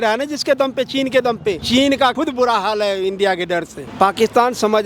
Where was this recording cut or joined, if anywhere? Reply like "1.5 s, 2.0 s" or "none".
1.6 s, 2.2 s, 3.8 s

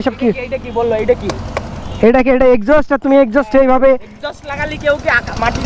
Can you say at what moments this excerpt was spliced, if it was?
none

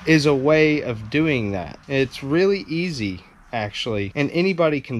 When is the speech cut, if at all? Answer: 1.7 s, 4.1 s

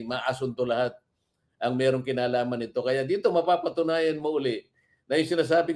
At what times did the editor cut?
none

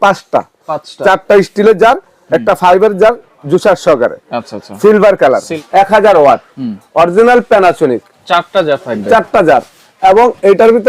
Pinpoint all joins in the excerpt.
5.5 s

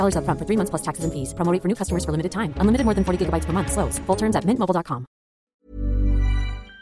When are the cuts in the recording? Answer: 5.4 s

